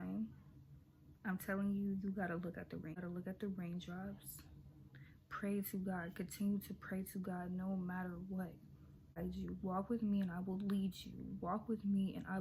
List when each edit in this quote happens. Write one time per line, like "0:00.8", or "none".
0:03.0
0:09.2